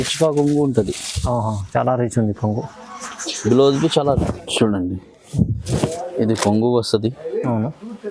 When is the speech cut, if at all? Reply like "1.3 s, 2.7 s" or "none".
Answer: 4.2 s

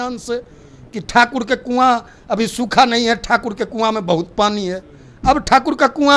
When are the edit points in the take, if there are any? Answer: none

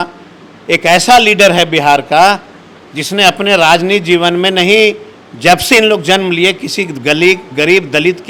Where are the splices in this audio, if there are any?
none

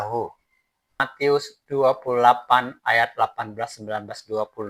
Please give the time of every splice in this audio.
1.1 s

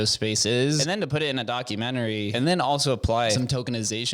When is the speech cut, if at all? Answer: 0.8 s, 2.3 s, 3.4 s

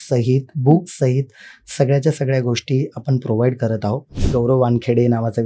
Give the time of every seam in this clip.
4.2 s

